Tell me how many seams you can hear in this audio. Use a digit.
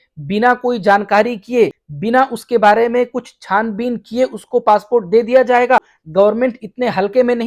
2